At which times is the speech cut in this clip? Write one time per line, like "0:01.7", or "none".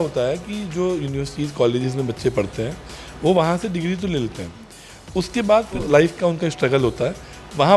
0:05.8